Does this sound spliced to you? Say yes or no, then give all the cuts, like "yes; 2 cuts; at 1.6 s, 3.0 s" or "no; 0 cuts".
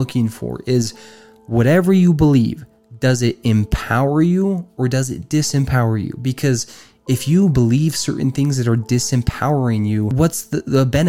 yes; 1 cut; at 10.1 s